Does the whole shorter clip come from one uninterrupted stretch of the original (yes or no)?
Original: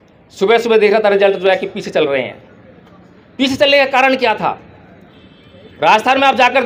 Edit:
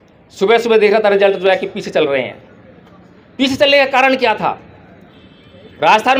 yes